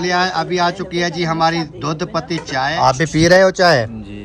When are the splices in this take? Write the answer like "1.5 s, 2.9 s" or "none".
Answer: 2.7 s